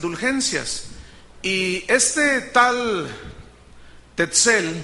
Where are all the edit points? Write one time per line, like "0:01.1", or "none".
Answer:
0:02.4